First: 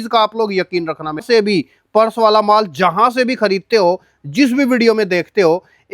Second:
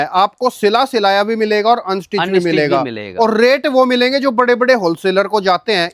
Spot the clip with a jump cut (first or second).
first